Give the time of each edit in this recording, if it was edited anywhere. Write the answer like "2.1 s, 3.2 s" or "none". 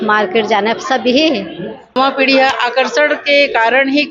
1.9 s